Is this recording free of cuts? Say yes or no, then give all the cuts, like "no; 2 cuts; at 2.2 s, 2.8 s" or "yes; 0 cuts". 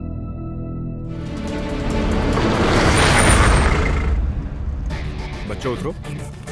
no; 1 cut; at 1.3 s